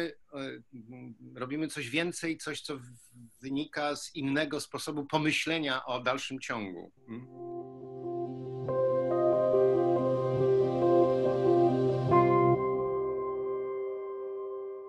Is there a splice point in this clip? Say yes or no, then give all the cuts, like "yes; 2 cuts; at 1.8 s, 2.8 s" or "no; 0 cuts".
yes; 1 cut; at 7.3 s